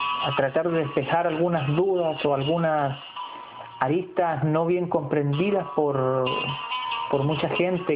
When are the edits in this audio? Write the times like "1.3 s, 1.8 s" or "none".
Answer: 4.5 s